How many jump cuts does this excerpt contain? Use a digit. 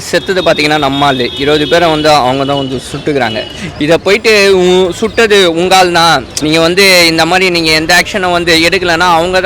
1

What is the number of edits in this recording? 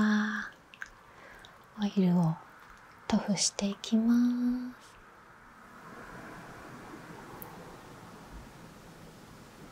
0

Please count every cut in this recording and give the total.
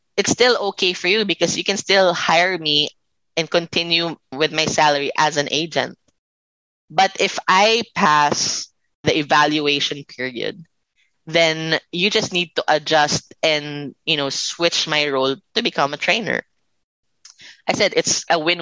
3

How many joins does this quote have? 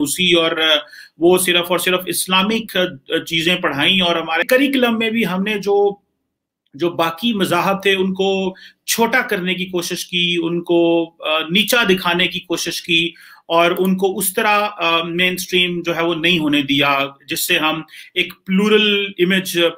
0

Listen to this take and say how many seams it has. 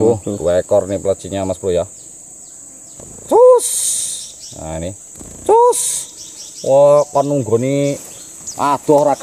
0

